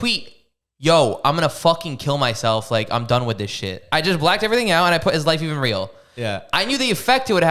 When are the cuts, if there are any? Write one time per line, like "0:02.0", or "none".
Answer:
0:03.8